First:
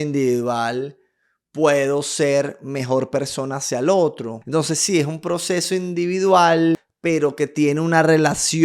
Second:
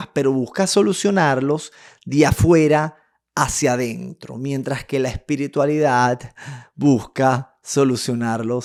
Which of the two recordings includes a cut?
first; 2 cuts; at 4.3 s, 6.9 s

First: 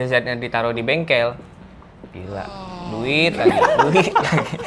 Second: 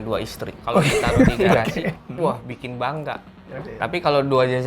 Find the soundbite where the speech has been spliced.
second; 2 cuts; at 2.0 s, 3.6 s

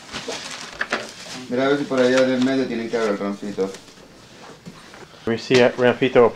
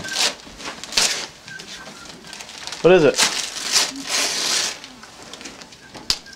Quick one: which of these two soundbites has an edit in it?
first; 1 cut; at 5.3 s

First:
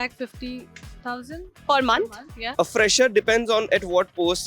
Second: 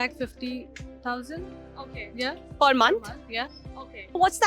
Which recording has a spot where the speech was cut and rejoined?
first; 2 cuts; at 1.5 s, 2.4 s

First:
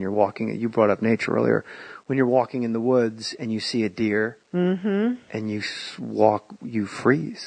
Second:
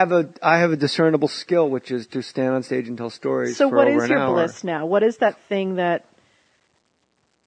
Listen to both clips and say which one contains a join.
first; 1 cut; at 1.9 s

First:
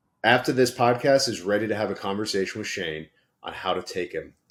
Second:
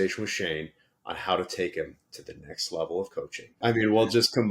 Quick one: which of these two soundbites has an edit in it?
second; 1 cut; at 3.6 s

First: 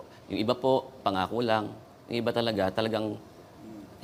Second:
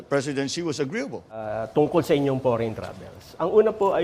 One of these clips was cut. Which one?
second; 1 cut; at 1.5 s

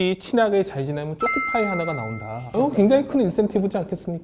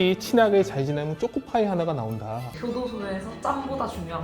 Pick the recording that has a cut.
second; 1 cut; at 2.4 s

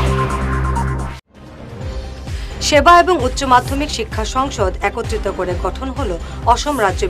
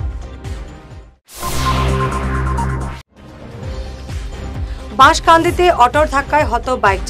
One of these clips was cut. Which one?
first; 1 cut; at 2.1 s

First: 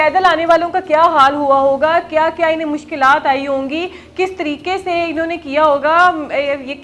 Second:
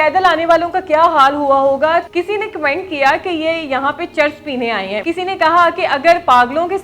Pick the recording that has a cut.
second; 2 cuts; at 2.1 s, 5.0 s

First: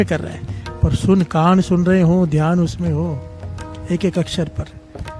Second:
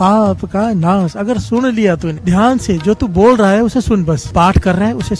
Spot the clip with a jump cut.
second; 2 cuts; at 2.1 s, 4.2 s

